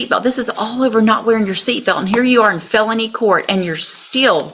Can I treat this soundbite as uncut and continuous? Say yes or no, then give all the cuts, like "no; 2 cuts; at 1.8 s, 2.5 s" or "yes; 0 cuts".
yes; 0 cuts